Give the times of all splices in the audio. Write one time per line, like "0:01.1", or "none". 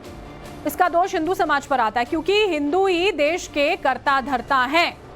0:02.9